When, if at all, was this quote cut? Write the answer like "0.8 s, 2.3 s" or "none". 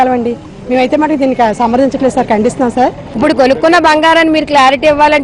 3.0 s